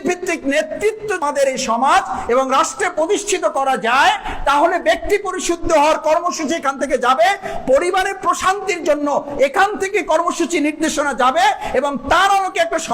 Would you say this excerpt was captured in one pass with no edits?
no; 1 cut; at 1.2 s

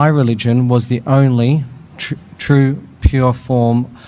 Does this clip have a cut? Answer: no; 0 cuts

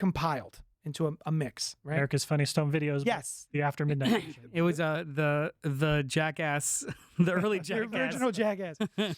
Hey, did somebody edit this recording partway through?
no; 0 cuts

